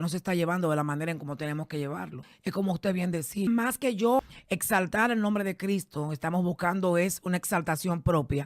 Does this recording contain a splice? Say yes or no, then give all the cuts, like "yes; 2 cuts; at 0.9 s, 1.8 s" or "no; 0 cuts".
yes; 3 cuts; at 2.2 s, 3.5 s, 4.3 s